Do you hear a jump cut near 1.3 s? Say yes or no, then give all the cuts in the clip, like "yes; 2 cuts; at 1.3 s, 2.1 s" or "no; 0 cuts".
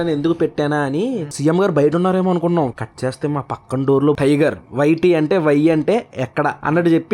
yes; 3 cuts; at 1.3 s, 2.7 s, 4.2 s